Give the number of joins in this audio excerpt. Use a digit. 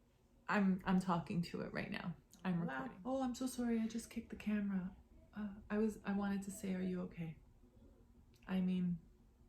1